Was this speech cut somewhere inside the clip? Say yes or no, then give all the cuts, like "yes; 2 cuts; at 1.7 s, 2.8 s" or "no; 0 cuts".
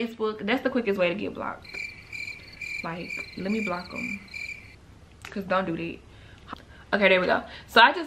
yes; 1 cut; at 6.4 s